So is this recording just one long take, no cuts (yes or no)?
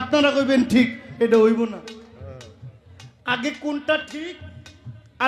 yes